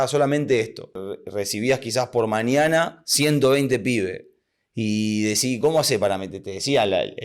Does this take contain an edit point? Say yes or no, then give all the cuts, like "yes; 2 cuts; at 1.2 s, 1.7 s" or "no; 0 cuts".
yes; 1 cut; at 1.1 s